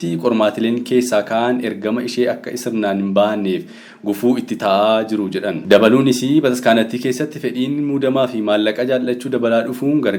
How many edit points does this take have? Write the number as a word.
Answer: one